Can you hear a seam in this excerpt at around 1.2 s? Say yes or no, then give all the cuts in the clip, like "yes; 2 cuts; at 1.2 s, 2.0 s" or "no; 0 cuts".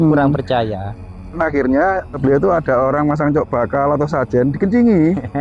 yes; 2 cuts; at 1.2 s, 2.2 s